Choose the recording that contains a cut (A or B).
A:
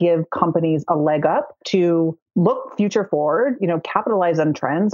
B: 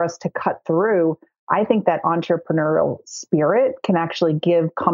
A